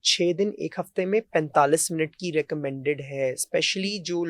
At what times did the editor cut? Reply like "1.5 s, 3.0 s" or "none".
none